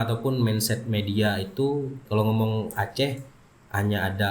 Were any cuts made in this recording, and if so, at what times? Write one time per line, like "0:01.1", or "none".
0:02.0